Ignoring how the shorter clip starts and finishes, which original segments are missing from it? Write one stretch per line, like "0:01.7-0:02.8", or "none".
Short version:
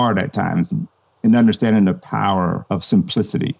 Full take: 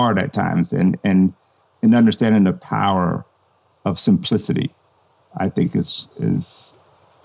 0:00.7-0:01.3
0:03.2-0:03.8